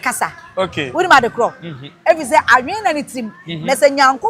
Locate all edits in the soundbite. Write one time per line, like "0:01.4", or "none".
none